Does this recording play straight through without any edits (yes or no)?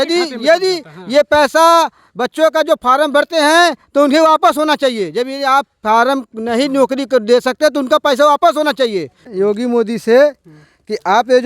no